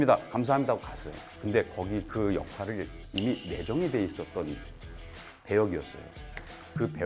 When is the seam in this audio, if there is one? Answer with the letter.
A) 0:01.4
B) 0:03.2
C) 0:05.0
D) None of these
D